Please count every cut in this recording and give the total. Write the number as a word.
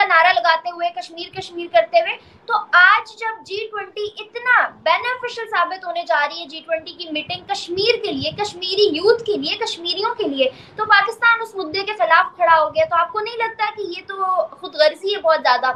zero